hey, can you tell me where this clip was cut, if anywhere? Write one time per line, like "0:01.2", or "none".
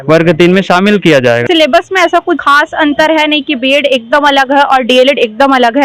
0:01.4
0:02.4